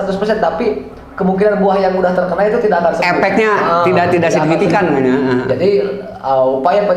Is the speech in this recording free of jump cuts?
yes; 0 cuts

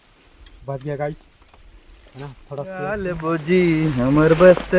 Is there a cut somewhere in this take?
yes; 1 cut; at 3.0 s

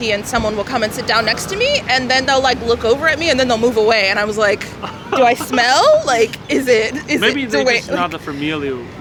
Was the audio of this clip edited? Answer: no; 0 cuts

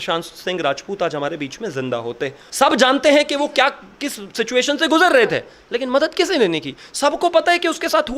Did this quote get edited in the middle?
yes; 1 cut; at 2.4 s

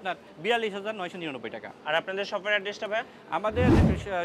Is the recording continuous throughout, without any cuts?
yes; 0 cuts

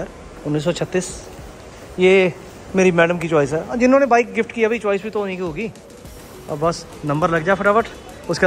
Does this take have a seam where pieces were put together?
no; 0 cuts

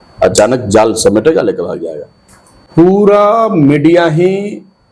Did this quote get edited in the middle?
yes; 1 cut; at 2.6 s

